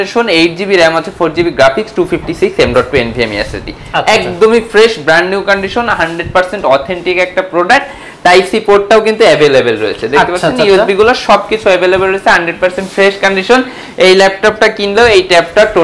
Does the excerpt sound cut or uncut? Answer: uncut